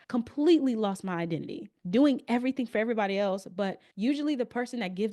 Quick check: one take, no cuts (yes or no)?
yes